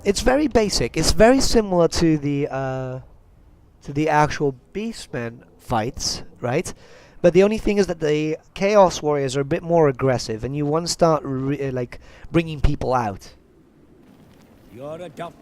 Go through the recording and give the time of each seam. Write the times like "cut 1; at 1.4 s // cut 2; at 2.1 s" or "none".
cut 1; at 10.4 s